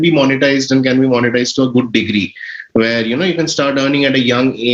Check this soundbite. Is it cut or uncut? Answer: uncut